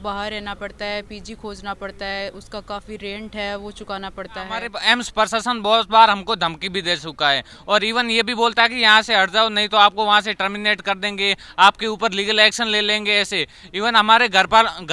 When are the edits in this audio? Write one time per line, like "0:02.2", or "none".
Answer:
0:04.7